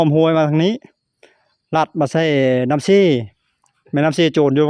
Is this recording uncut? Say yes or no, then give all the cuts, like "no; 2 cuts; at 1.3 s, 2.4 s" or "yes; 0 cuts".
yes; 0 cuts